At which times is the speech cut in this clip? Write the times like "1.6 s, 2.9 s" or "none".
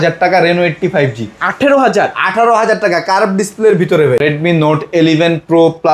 4.2 s